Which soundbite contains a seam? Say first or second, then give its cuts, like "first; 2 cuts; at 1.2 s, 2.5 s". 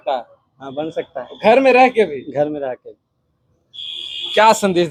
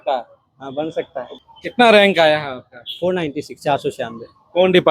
second; 1 cut; at 1.3 s